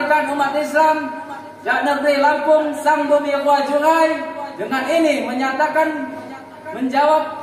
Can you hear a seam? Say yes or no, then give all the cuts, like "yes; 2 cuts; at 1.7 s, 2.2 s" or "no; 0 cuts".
no; 0 cuts